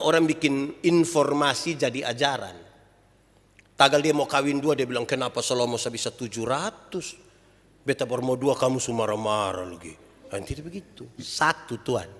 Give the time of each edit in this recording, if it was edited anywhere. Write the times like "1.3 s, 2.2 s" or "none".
none